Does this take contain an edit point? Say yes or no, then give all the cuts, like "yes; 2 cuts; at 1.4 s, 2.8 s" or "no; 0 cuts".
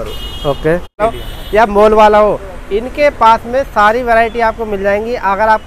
yes; 1 cut; at 1.0 s